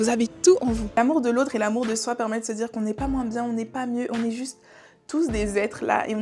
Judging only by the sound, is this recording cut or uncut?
cut